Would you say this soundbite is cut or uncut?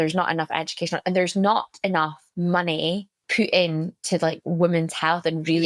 cut